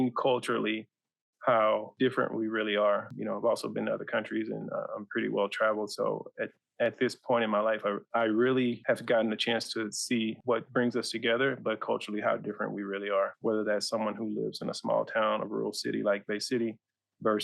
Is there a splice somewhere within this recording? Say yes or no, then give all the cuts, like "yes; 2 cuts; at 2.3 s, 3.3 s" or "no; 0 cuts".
yes; 5 cuts; at 1.9 s, 3.1 s, 8.0 s, 8.8 s, 10.4 s